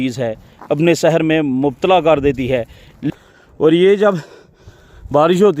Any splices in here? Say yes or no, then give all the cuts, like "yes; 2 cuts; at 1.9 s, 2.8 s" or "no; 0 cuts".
yes; 1 cut; at 3.1 s